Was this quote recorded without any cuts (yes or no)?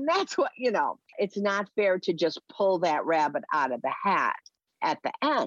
yes